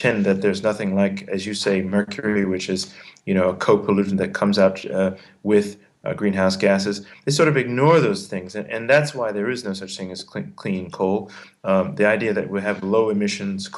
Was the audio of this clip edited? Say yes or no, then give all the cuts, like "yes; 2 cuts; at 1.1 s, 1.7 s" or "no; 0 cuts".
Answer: yes; 1 cut; at 12.8 s